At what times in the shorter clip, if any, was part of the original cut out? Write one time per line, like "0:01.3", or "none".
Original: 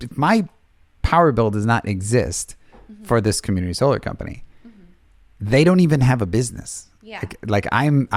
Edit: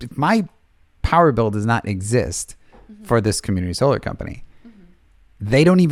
none